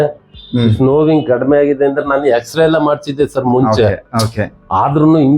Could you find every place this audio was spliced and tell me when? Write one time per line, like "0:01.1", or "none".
none